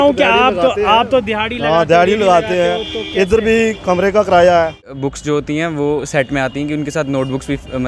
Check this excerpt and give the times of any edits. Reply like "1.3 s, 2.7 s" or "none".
4.9 s